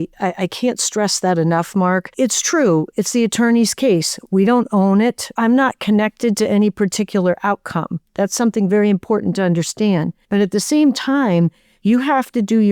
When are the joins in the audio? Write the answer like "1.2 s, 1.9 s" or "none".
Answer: 2.1 s, 5.2 s, 10.2 s